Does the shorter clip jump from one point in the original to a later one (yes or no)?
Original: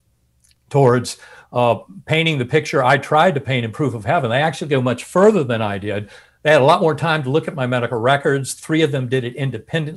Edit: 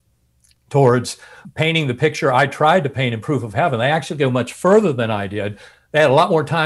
yes